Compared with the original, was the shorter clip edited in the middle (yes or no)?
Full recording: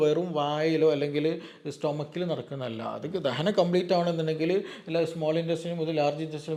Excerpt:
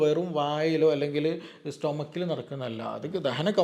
no